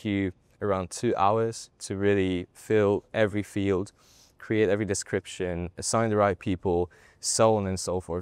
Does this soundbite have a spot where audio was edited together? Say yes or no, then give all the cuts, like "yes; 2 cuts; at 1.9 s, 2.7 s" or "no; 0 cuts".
no; 0 cuts